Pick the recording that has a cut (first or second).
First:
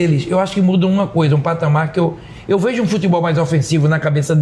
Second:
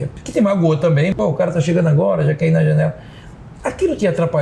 second